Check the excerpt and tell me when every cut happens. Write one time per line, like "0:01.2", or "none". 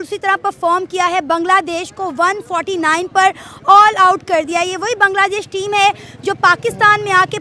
none

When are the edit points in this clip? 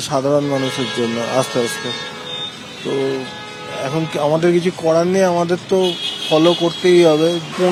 none

